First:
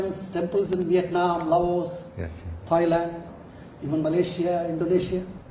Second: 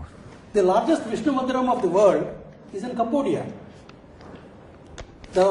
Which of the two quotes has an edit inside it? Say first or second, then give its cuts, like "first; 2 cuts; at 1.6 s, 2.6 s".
first; 1 cut; at 2.1 s